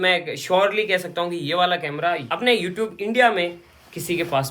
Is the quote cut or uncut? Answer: uncut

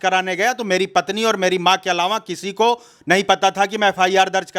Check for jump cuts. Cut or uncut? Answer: uncut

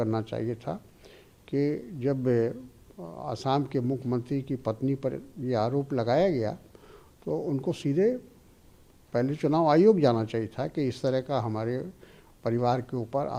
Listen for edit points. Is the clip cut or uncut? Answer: uncut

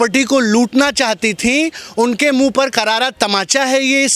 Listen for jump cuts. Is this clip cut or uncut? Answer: uncut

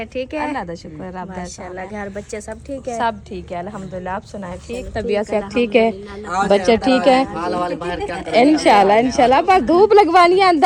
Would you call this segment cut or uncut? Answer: uncut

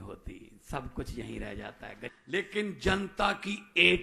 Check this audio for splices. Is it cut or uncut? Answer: cut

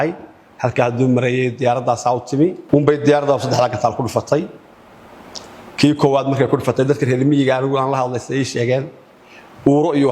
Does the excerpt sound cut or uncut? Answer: cut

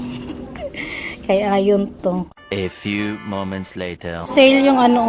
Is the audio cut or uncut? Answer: cut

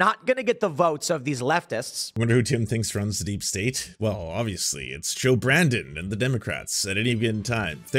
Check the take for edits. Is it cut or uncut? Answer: cut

